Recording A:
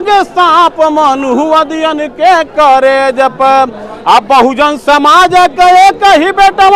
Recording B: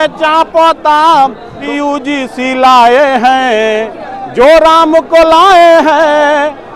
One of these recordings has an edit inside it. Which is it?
B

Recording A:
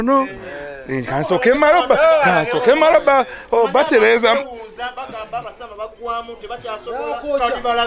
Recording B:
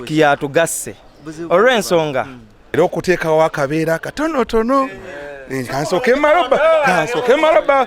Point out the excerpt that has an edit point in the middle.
B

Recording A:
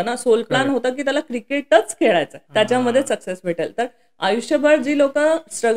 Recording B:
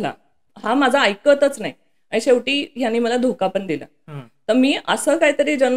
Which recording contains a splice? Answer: A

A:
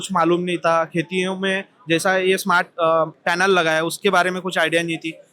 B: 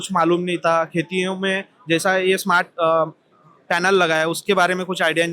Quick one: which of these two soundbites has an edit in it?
A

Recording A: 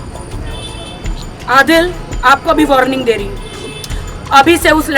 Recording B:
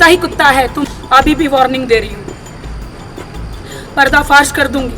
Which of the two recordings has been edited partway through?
B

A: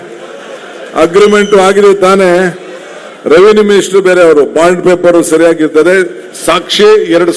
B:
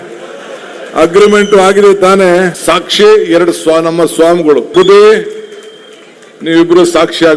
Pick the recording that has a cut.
B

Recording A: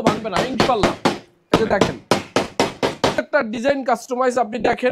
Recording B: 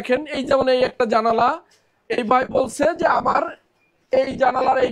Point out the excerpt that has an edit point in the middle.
A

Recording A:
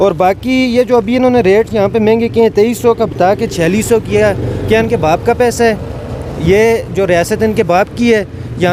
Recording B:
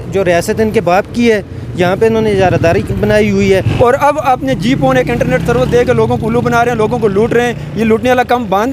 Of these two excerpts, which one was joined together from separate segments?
B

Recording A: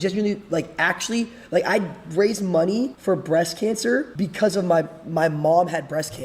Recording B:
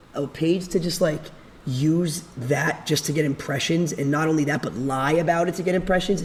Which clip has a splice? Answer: A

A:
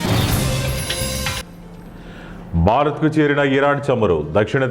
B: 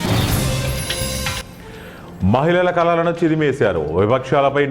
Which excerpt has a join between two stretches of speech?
A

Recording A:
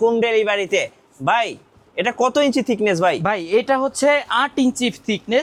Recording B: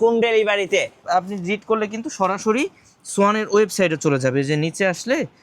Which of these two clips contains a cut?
B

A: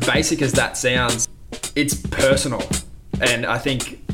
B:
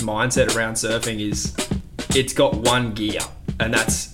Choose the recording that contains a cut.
A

